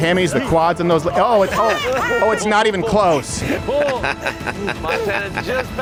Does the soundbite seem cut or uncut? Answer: uncut